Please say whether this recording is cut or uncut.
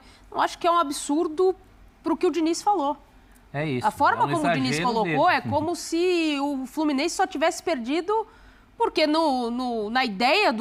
uncut